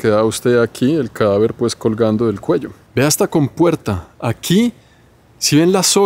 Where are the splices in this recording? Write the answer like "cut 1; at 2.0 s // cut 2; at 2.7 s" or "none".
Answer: cut 1; at 2.8 s